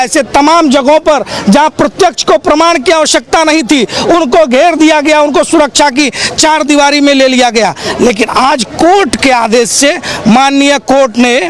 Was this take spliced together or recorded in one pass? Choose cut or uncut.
uncut